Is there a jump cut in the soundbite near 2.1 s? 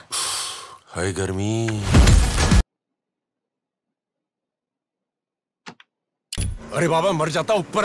no; 1 cut; at 6.5 s

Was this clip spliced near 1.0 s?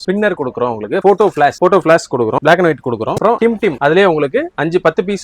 yes; 2 cuts; at 1.0 s, 2.4 s

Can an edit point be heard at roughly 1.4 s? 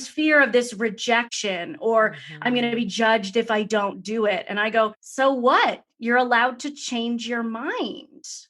yes; 2 cuts; at 1.4 s, 5.0 s

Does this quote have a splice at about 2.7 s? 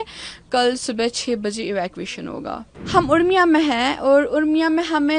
yes; 1 cut; at 2.7 s

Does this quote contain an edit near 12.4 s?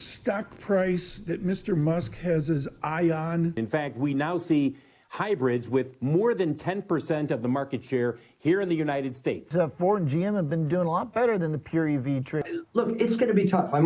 yes; 3 cuts; at 3.5 s, 9.5 s, 12.4 s

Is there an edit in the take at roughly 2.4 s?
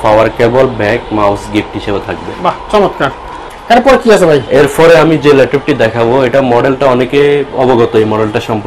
no; 0 cuts

